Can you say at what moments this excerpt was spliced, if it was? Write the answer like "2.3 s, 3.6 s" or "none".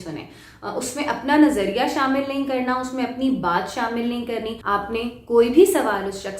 4.6 s